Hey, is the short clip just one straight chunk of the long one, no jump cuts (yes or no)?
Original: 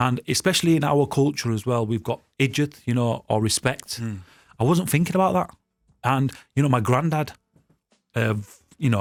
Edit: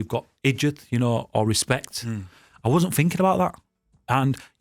yes